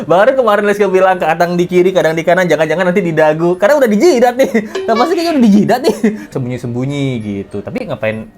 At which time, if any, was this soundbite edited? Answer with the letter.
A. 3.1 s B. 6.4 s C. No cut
B